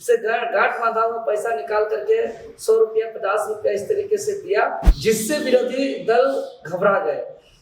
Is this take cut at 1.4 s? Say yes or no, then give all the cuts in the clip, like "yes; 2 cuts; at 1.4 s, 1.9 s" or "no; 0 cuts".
no; 1 cut; at 4.9 s